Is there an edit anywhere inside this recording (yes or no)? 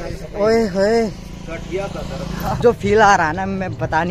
yes